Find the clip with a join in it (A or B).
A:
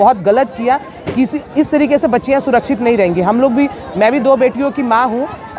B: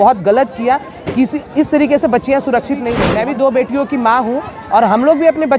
B